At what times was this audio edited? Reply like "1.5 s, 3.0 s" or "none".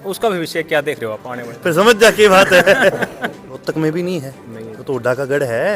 1.4 s, 3.5 s